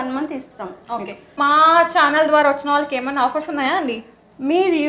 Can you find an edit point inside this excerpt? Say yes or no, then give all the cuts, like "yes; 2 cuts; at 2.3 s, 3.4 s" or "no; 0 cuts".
yes; 1 cut; at 1.4 s